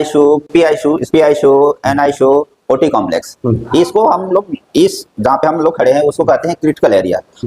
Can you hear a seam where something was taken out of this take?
no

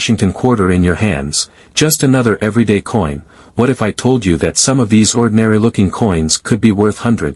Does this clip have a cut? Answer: no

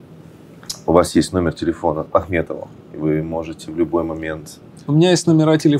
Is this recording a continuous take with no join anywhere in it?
no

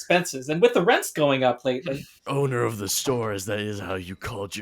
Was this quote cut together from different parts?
yes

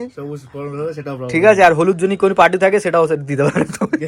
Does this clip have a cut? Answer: no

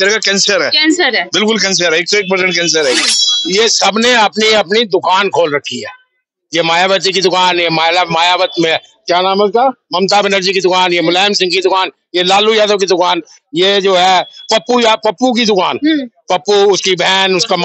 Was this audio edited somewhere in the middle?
yes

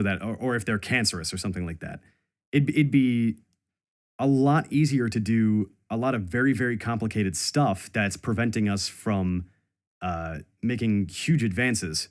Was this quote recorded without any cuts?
yes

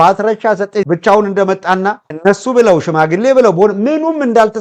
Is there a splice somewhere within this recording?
no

